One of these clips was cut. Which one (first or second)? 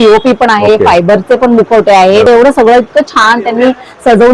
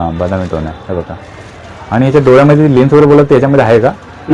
first